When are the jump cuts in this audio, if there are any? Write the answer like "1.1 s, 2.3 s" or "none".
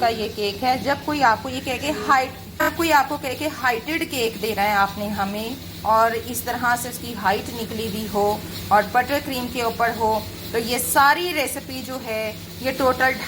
2.7 s